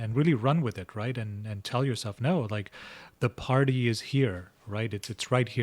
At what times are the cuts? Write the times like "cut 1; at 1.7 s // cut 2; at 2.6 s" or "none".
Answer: none